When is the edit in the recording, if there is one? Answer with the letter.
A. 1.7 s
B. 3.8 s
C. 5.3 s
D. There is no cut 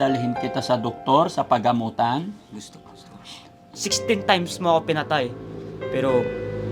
B